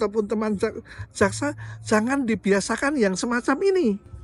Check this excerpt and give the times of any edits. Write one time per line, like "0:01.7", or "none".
none